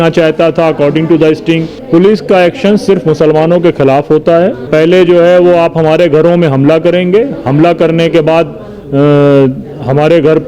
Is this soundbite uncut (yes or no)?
no